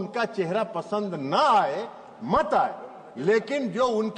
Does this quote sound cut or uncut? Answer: uncut